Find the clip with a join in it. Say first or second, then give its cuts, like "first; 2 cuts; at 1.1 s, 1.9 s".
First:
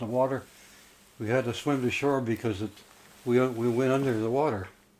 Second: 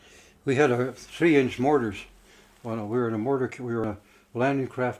second; 1 cut; at 3.8 s